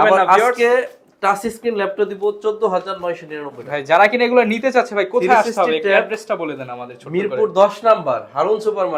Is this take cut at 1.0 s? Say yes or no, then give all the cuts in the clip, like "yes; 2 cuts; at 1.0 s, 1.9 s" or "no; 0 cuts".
no; 0 cuts